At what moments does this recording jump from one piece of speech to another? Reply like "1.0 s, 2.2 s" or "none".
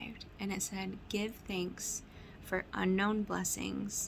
none